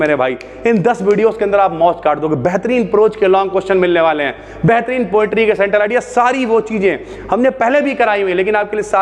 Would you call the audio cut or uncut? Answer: uncut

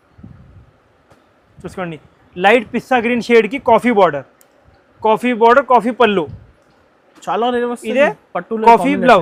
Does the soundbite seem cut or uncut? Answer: uncut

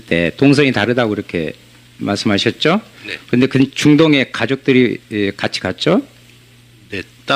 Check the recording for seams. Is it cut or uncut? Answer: cut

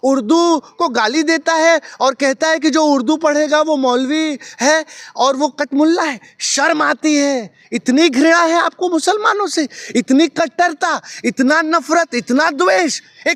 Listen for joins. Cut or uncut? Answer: uncut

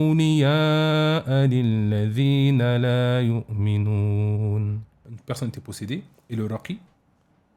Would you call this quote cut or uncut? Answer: cut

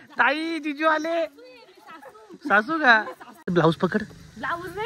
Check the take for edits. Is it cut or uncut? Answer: cut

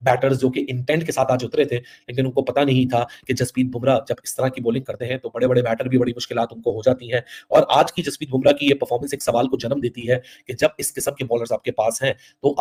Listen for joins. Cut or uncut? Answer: uncut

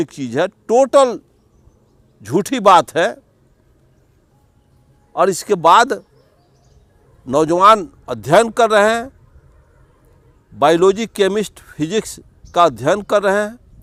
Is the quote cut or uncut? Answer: uncut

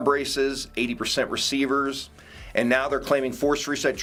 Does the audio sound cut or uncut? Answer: uncut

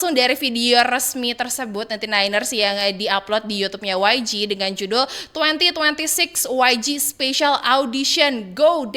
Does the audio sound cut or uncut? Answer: uncut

